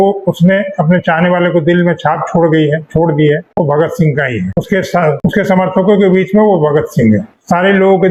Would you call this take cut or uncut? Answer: uncut